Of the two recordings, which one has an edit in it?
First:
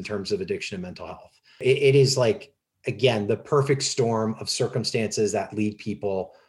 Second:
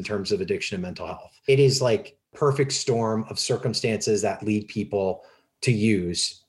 second; 2 cuts; at 1.5 s, 2.3 s

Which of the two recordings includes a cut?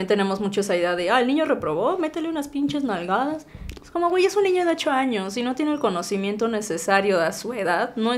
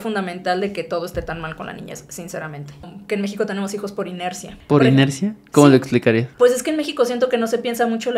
second; 3 cuts; at 2.9 s, 4.5 s, 6.3 s

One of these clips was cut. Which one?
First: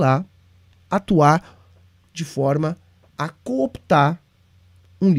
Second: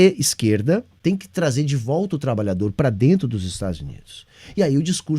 second; 1 cut; at 0.9 s

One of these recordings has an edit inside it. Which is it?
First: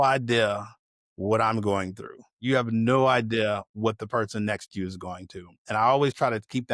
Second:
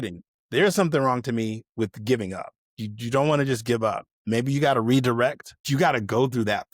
second; 1 cut; at 5.5 s

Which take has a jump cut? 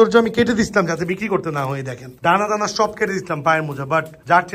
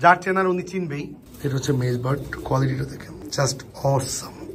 second; 2 cuts; at 1.2 s, 3.1 s

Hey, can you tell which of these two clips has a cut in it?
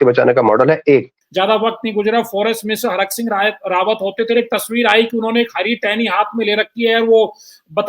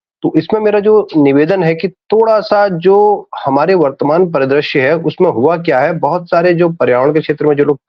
first; 1 cut; at 1.2 s

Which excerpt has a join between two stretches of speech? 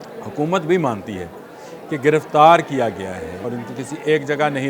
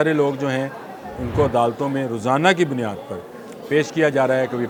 first; 1 cut; at 3.4 s

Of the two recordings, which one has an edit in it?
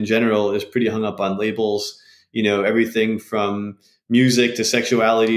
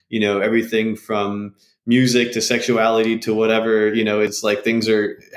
second; 1 cut; at 4.4 s

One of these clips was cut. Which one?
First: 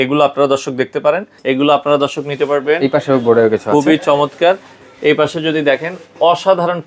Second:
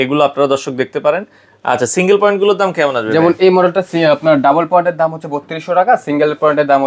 first; 1 cut; at 1.3 s

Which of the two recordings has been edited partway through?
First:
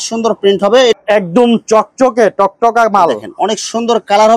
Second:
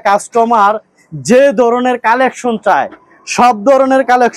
first; 1 cut; at 0.9 s

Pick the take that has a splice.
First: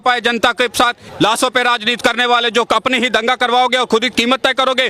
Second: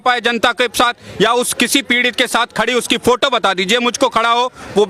first; 1 cut; at 1.0 s

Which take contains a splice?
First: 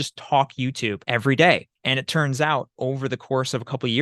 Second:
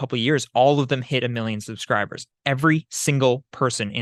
first; 2 cuts; at 1.0 s, 1.7 s

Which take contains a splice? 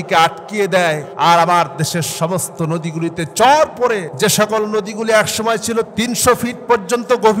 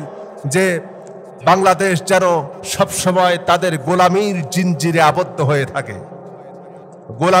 first; 2 cuts; at 1.1 s, 4.1 s

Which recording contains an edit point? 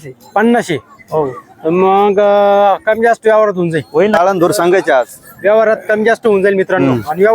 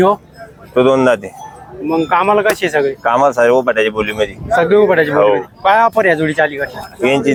first; 1 cut; at 4.1 s

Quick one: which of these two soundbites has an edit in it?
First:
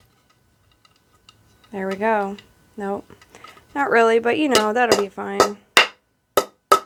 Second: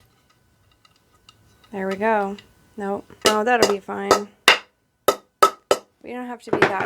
second; 1 cut; at 3.2 s

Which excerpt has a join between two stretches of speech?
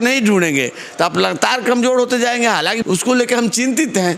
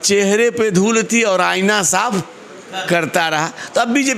first; 1 cut; at 2.8 s

